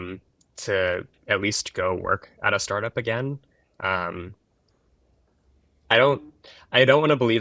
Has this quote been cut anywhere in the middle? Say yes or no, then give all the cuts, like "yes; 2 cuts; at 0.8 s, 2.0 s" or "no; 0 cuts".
no; 0 cuts